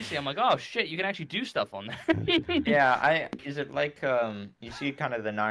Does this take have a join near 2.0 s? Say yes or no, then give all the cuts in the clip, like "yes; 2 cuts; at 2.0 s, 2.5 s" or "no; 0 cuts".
no; 1 cut; at 3.4 s